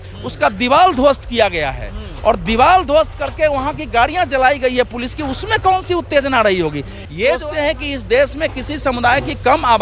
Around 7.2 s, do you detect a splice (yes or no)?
yes